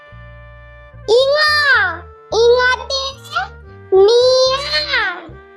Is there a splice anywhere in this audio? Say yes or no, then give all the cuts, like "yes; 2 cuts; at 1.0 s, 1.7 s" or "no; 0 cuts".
yes; 1 cut; at 1.1 s